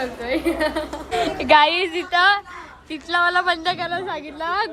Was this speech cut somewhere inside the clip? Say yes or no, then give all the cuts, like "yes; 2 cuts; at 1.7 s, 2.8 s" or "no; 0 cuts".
yes; 1 cut; at 1.0 s